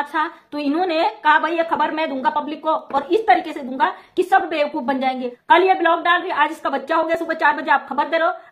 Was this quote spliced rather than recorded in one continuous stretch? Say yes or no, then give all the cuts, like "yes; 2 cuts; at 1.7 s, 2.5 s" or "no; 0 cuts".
yes; 1 cut; at 5.3 s